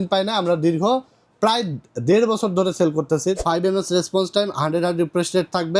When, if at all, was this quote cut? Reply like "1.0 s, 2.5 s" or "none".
3.4 s